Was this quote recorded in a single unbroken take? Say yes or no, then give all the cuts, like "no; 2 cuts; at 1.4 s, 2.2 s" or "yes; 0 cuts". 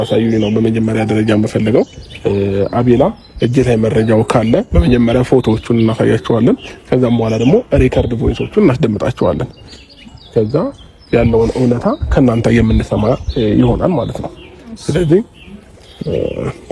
yes; 0 cuts